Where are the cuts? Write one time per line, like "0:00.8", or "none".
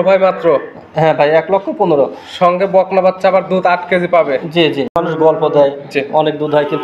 0:04.9